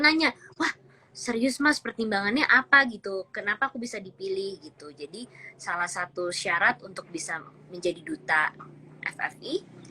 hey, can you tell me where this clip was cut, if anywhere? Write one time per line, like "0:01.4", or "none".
none